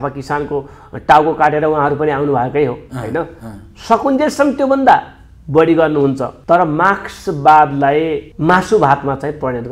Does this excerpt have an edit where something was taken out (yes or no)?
yes